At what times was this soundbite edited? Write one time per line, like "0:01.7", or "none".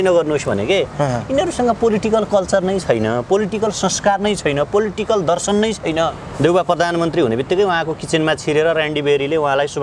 0:06.2

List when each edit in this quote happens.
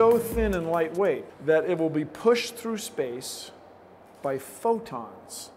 0:01.3

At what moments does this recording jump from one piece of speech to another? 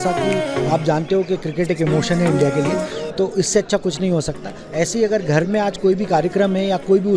0:04.6

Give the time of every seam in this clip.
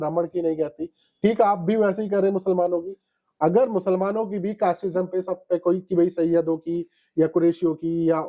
none

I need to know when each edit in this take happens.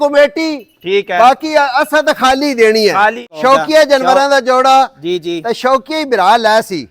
0:03.3

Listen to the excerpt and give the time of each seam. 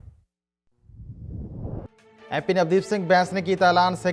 0:01.9

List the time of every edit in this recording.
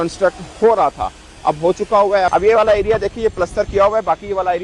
0:02.3

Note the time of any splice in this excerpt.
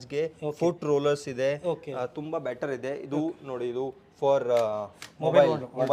none

